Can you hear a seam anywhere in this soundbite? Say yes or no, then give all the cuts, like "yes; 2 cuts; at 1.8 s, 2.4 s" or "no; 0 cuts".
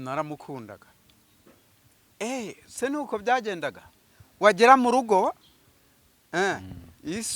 no; 0 cuts